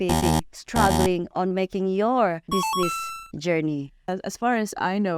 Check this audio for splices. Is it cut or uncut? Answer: cut